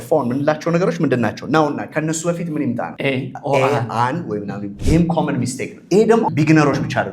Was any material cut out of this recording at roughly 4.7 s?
yes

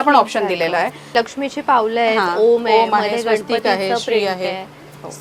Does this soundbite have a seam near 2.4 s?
no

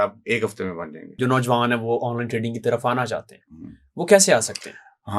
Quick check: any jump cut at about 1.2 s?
yes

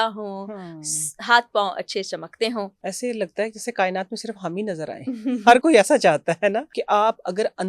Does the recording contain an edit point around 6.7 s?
yes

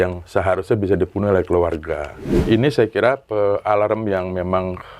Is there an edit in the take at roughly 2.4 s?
yes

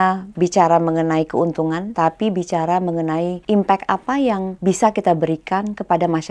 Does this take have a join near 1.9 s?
yes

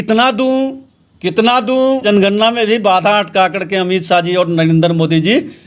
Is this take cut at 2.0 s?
yes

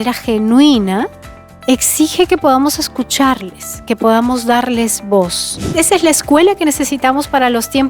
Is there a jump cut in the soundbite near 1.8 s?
no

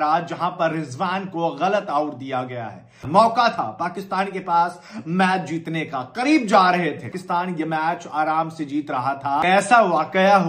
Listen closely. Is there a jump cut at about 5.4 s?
no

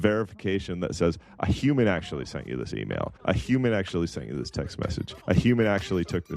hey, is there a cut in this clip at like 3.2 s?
yes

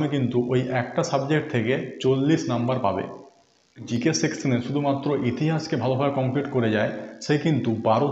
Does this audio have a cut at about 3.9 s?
yes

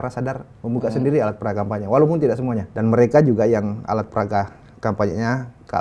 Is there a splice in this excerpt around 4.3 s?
no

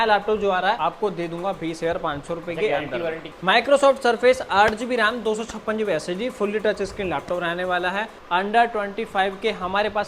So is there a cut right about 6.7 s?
no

